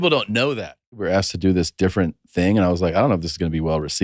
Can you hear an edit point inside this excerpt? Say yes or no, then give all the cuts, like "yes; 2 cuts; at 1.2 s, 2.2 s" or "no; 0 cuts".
yes; 1 cut; at 0.9 s